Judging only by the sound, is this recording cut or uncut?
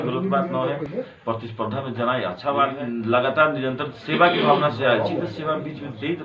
cut